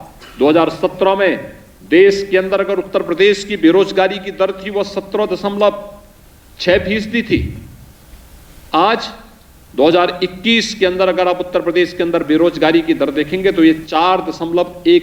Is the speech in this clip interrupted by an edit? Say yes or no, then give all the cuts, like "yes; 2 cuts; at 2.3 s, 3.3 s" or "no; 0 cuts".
no; 0 cuts